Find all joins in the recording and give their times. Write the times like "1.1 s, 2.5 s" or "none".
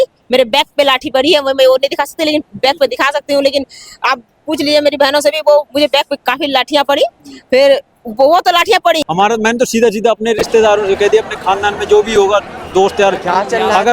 9.0 s